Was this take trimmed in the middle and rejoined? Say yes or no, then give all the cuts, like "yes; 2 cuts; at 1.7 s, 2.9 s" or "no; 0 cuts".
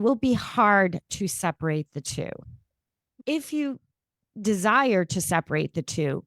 yes; 1 cut; at 3.1 s